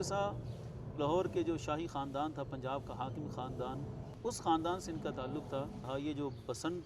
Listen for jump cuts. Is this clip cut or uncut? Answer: cut